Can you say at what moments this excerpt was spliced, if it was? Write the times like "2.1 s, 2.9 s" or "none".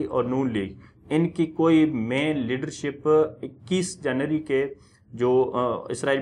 none